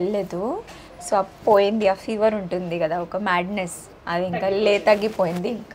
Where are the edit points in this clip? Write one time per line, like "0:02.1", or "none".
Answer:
none